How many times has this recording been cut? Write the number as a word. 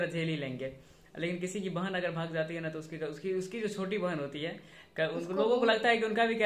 zero